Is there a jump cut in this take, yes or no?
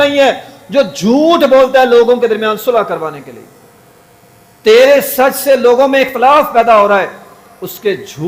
no